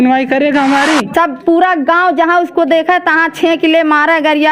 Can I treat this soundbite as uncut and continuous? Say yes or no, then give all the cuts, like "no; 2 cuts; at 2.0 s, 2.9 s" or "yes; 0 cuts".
no; 1 cut; at 1.1 s